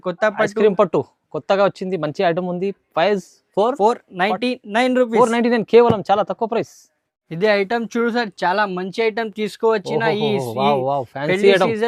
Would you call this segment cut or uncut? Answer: uncut